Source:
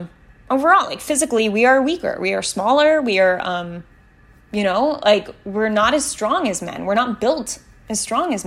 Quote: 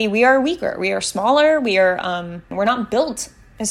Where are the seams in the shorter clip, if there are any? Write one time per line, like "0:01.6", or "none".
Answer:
0:02.4

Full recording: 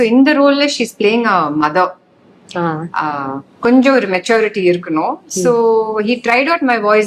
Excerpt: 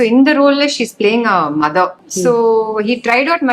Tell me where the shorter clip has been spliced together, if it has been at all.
0:02.1

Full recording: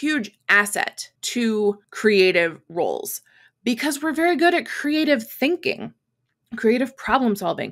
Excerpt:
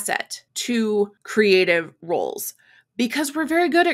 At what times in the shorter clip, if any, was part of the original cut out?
none

